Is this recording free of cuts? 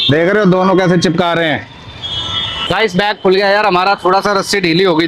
no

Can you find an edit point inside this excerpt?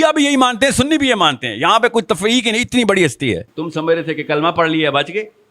yes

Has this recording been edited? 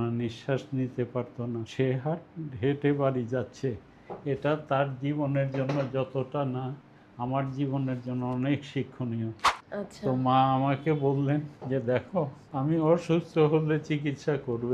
yes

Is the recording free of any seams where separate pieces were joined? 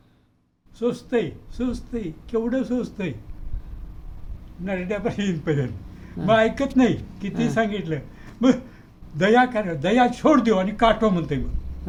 yes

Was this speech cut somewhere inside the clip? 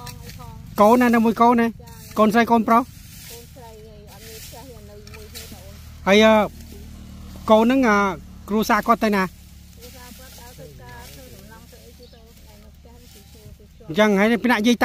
no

